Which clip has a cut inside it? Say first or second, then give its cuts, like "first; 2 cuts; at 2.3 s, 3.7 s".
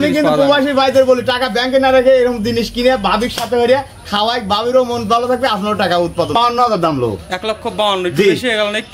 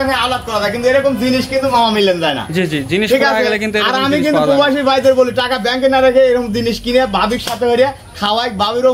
first; 1 cut; at 6.3 s